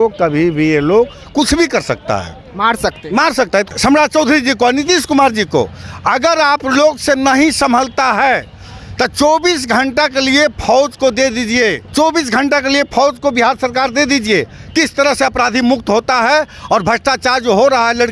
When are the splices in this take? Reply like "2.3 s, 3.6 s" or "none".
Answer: 3.7 s, 11.8 s